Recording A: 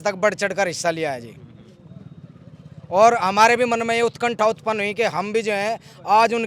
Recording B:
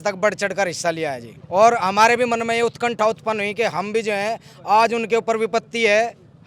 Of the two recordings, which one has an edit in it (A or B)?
B